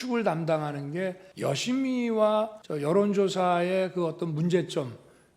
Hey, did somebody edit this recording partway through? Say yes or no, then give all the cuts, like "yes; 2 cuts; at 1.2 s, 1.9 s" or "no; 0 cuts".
yes; 2 cuts; at 1.3 s, 2.6 s